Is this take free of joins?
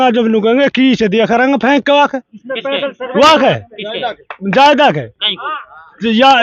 yes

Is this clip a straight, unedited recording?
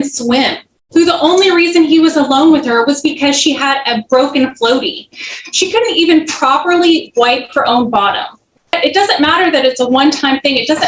no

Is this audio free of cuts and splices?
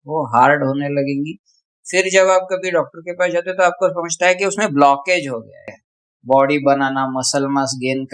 no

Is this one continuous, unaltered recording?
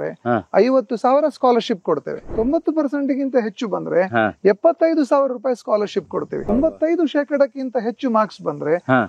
no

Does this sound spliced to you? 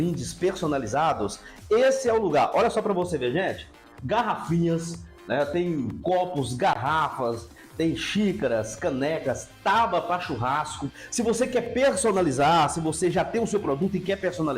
no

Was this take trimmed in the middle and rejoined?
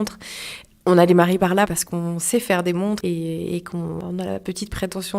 yes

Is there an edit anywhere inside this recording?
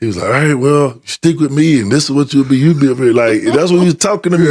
no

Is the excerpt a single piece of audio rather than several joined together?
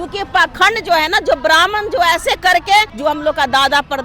no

